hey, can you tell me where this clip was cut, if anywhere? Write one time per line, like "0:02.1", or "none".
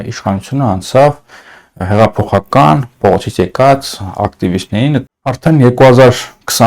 0:05.1

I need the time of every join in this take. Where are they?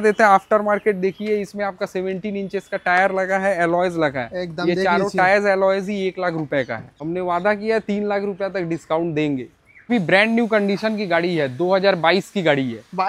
0:06.9
0:09.9

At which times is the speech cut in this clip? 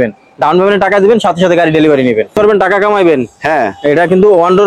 0:02.3

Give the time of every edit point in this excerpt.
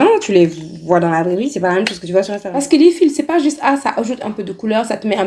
0:02.5

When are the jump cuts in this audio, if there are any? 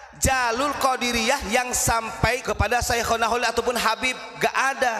0:02.5

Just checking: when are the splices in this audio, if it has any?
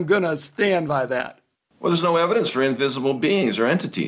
none

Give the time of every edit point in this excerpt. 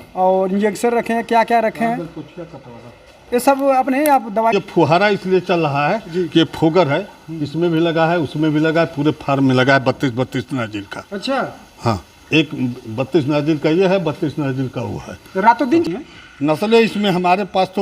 0:04.5
0:15.8

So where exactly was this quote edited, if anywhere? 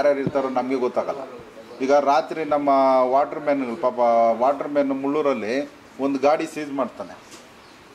none

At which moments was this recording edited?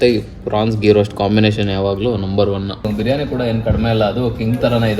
0:02.8

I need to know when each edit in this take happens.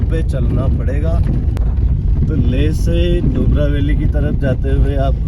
0:01.5

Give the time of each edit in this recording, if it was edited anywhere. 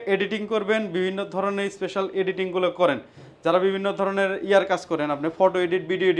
none

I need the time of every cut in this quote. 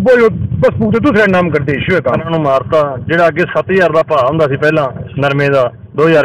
0:02.3

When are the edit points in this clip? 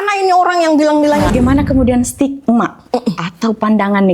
0:01.3

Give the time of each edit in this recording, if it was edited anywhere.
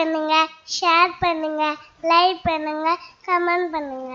none

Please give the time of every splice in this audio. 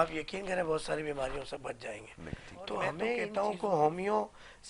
0:03.3

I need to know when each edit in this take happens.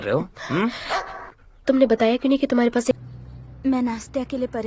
0:03.0

